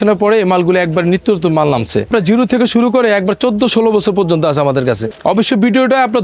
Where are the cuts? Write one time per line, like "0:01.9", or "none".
0:02.1
0:05.1

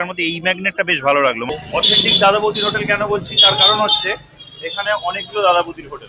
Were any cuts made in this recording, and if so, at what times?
0:01.5

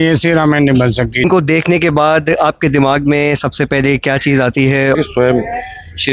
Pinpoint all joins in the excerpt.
0:01.2
0:05.0

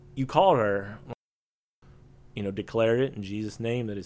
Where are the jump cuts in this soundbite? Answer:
0:01.6

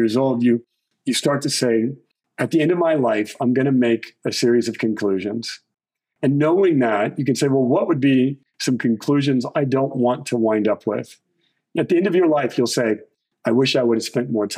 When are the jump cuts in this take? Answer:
none

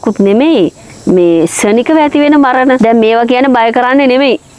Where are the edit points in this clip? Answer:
0:02.8

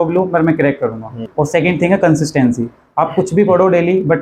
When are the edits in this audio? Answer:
0:01.3

